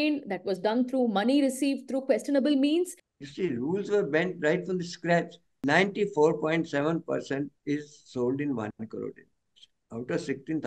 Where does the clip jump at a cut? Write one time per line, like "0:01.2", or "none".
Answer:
0:03.0
0:05.4